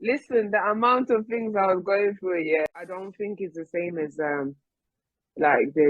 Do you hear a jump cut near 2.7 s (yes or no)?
yes